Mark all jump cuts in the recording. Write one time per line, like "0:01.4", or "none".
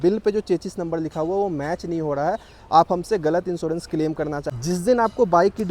0:04.5